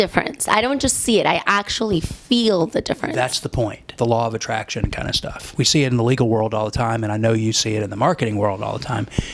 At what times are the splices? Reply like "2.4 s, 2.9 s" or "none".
3.8 s